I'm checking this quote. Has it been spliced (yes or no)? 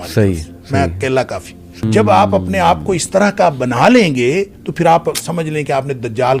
yes